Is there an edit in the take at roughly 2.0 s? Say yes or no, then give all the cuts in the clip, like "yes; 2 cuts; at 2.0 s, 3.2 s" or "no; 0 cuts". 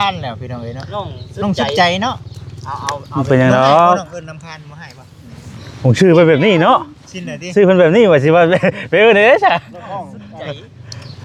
no; 0 cuts